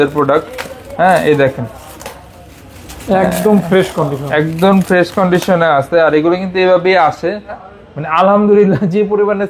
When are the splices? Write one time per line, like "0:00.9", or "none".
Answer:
0:07.6